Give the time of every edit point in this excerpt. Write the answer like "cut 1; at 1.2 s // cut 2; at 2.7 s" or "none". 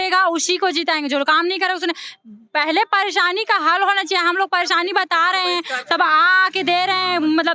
none